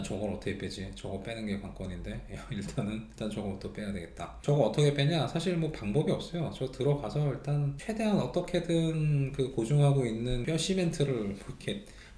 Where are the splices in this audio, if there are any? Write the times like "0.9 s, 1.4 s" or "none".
none